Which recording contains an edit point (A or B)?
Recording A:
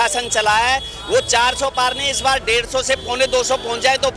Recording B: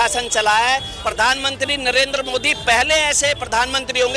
B